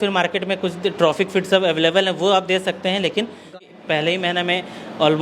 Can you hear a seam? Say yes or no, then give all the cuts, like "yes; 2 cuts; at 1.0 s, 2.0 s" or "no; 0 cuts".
yes; 1 cut; at 3.5 s